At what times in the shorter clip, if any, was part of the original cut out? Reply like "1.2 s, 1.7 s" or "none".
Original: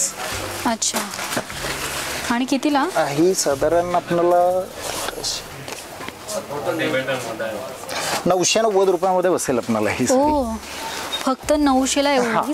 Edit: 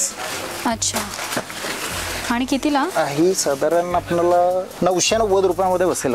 4.7 s